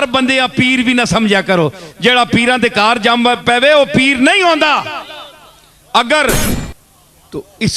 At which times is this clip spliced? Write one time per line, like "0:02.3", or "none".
0:06.5